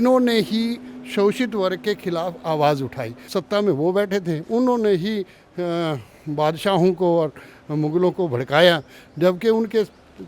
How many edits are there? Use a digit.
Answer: 1